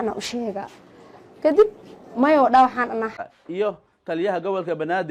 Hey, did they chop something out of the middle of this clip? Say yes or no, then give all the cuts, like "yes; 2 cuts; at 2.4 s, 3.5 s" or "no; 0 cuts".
yes; 1 cut; at 3.1 s